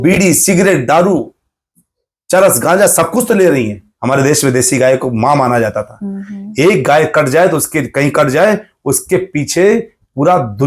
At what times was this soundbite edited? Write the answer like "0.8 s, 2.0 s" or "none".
3.9 s